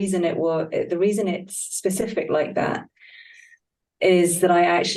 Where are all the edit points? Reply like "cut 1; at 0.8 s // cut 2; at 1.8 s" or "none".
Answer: none